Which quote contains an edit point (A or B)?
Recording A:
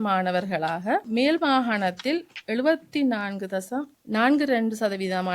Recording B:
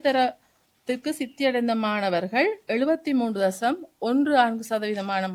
A